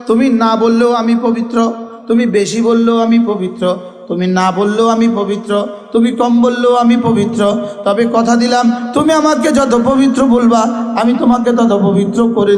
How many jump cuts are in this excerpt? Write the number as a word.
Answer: zero